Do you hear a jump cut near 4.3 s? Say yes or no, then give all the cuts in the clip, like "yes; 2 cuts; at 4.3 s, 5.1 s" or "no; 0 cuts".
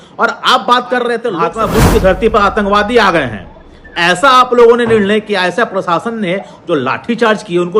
no; 1 cut; at 1.5 s